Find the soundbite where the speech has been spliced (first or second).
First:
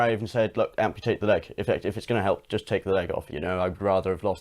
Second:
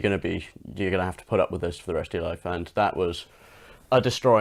first